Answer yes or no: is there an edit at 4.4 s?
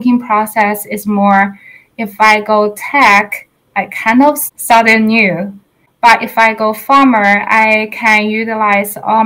yes